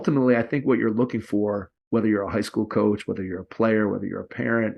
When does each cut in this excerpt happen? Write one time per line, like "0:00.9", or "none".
0:01.7